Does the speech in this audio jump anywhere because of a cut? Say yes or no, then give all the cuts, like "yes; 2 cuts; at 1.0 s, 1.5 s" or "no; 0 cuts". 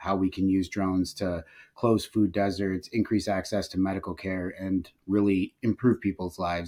no; 0 cuts